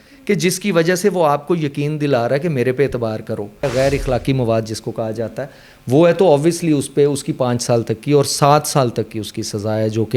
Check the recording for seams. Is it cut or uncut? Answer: cut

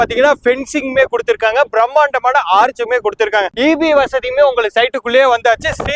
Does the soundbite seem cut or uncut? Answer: uncut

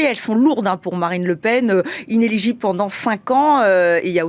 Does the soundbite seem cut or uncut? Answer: uncut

